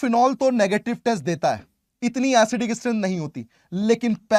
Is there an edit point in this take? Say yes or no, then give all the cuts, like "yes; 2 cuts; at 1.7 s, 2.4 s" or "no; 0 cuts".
no; 0 cuts